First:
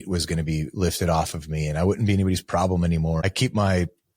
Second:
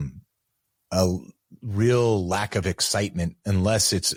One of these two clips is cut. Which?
first; 1 cut; at 3.2 s

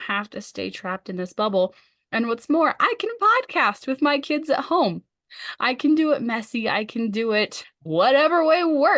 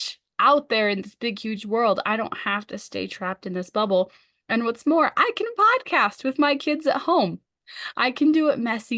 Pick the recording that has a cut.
first; 1 cut; at 7.9 s

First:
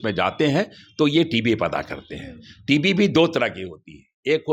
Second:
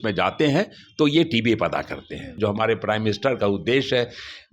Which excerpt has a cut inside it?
second; 1 cut; at 2.3 s

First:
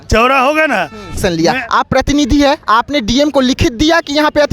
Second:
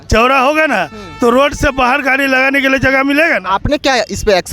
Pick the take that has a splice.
first; 1 cut; at 1.2 s

